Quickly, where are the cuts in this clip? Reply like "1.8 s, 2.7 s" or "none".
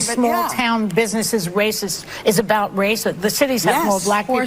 0.9 s